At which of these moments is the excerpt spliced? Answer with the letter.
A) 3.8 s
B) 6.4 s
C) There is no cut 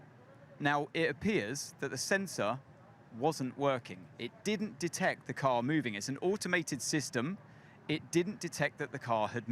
B